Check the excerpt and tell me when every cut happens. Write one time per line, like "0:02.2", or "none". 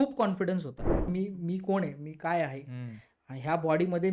0:01.1